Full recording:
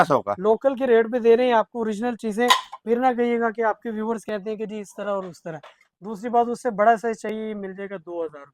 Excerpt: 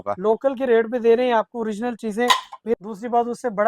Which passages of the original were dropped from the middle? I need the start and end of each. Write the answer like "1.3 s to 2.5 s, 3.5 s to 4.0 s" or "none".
3.0 s to 6.0 s

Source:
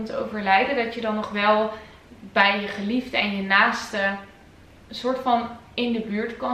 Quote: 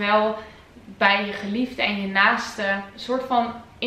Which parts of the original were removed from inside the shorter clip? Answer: 4.3 s to 4.9 s

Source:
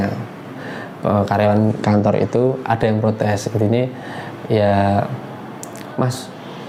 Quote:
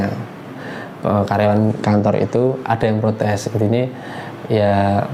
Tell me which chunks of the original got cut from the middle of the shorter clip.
none

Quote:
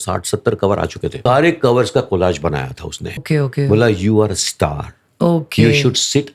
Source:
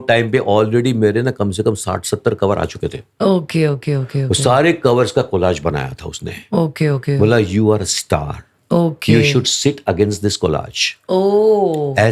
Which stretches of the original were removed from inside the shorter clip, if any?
3.0 s to 4.4 s, 6.4 s to 6.7 s

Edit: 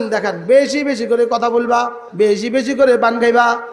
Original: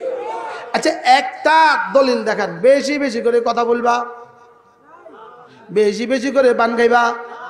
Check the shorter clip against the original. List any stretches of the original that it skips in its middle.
4.2 s to 5.6 s

